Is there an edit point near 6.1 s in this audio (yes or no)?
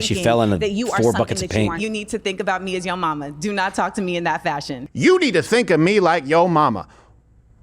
no